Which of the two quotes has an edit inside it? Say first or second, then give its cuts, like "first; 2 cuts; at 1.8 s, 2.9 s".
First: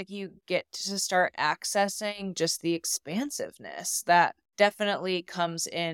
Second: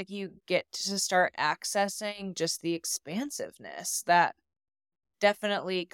first; 1 cut; at 4.4 s